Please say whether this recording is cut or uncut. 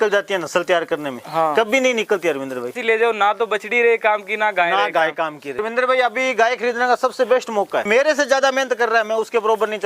cut